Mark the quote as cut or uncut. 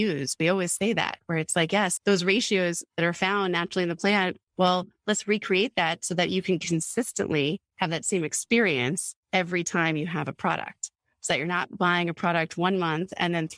cut